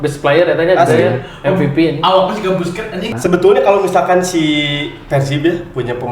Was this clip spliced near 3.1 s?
yes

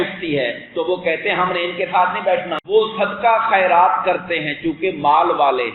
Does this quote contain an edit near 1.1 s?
no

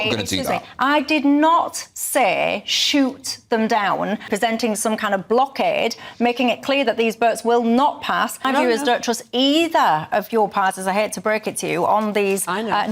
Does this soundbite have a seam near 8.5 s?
yes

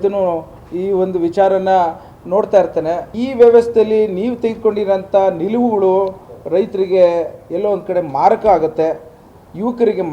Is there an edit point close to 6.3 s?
no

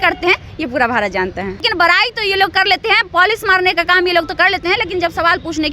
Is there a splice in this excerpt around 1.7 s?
yes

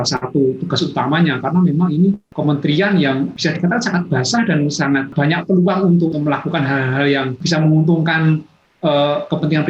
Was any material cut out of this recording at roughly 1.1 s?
no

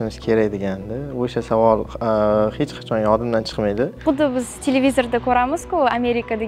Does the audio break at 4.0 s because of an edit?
yes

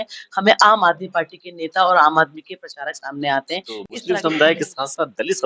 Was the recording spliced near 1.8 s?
no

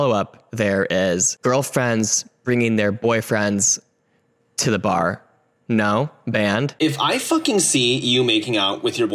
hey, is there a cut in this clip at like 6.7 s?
yes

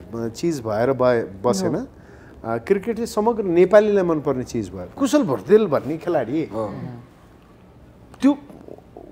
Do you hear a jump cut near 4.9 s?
yes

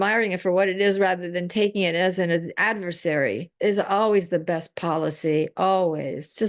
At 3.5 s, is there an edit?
yes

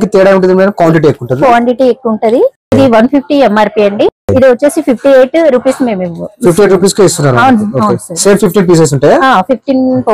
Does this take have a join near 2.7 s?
yes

